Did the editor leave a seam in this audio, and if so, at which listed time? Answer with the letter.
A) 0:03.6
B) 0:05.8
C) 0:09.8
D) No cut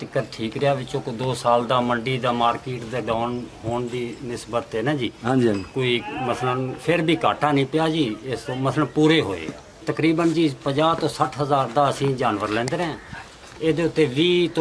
C